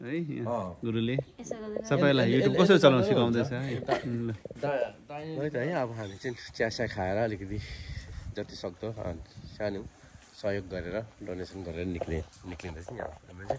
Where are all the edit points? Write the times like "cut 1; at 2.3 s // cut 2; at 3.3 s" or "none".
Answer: none